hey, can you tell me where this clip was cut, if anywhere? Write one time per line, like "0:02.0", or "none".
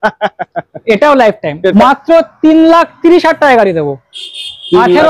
0:01.7